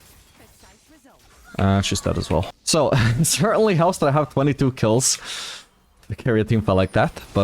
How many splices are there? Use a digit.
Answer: 1